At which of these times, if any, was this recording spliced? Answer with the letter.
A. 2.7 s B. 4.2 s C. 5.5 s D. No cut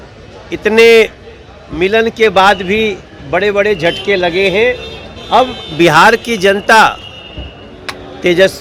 D